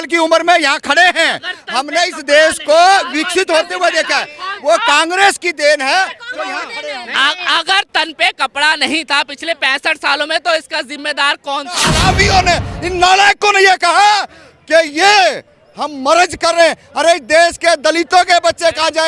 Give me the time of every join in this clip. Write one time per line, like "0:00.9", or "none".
0:11.9

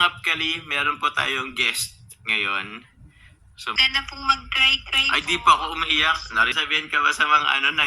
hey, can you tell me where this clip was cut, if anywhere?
0:03.8
0:06.5

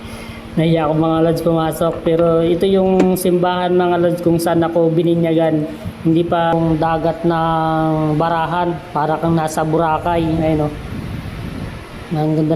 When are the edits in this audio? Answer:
0:06.5

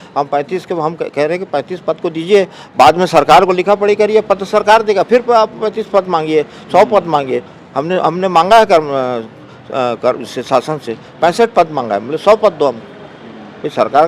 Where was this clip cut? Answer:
none

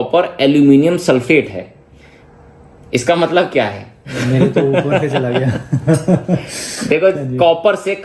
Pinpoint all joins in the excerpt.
none

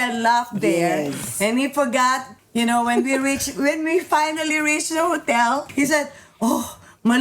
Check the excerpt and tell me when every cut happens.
0:02.4
0:05.7

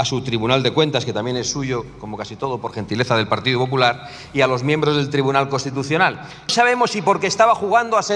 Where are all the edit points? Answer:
0:06.5

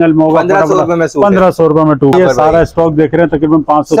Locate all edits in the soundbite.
0:02.1

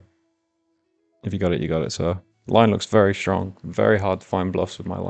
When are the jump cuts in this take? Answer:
0:02.3

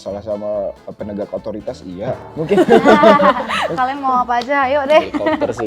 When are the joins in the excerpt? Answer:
0:02.2
0:03.7

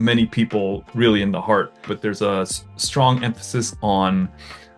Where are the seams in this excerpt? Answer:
0:01.9

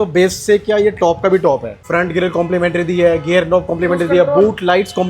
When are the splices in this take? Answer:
0:01.7

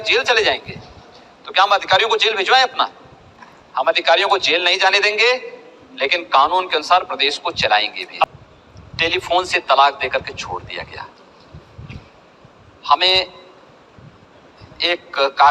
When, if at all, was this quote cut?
0:08.2

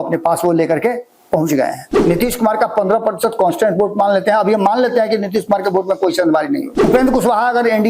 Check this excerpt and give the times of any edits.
0:01.9
0:06.8

